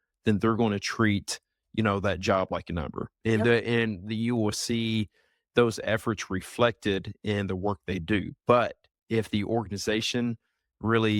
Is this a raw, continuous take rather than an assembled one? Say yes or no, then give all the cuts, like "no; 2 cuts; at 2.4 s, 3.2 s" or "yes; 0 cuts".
yes; 0 cuts